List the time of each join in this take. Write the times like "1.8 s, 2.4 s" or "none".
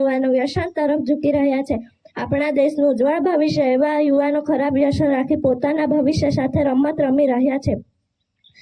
none